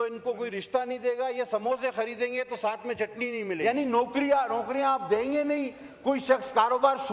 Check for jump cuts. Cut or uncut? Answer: cut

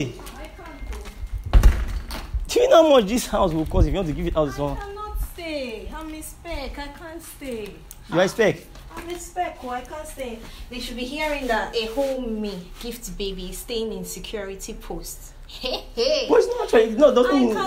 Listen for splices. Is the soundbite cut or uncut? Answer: uncut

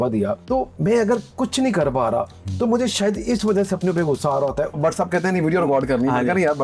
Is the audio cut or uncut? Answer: cut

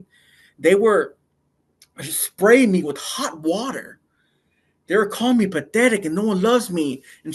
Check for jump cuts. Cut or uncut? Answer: uncut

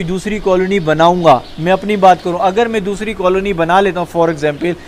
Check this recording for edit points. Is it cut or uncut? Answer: uncut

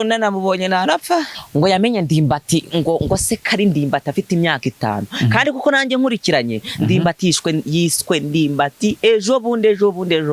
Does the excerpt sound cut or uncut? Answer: cut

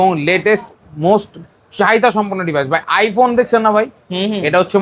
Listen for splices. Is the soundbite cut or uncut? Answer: uncut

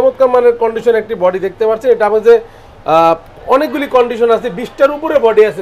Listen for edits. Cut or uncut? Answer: uncut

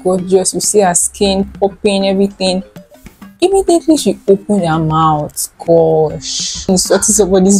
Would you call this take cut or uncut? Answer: cut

